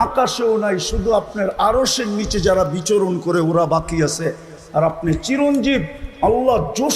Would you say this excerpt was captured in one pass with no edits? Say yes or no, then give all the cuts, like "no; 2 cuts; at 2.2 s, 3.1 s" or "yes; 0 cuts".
yes; 0 cuts